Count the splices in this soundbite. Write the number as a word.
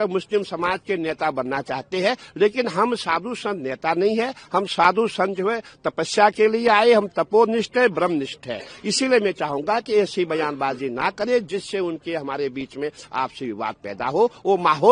zero